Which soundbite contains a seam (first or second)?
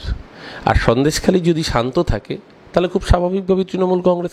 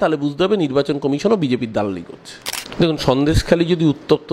second